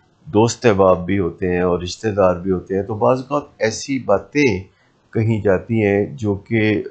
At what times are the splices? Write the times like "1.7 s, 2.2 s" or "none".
none